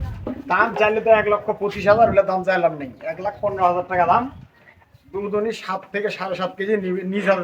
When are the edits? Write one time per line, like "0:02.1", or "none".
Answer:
none